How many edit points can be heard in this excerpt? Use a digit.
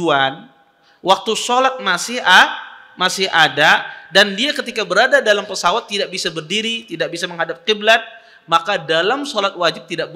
0